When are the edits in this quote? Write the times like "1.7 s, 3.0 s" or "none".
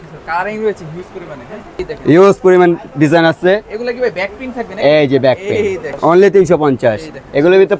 1.8 s, 5.9 s